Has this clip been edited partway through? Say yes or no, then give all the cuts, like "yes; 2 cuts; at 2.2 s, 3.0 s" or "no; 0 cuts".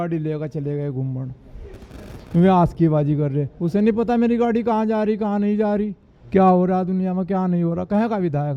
no; 0 cuts